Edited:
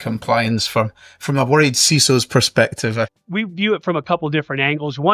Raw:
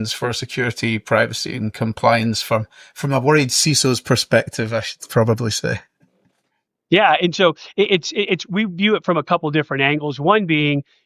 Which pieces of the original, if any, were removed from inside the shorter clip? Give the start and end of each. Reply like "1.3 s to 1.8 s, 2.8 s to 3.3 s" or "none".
5.0 s to 8.5 s